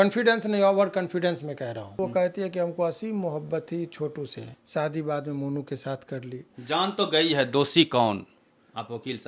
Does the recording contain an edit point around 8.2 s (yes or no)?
no